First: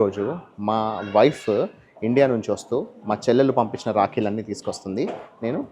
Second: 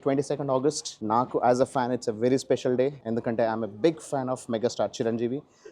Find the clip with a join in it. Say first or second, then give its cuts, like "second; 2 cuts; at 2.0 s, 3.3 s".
second; 2 cuts; at 0.9 s, 3.0 s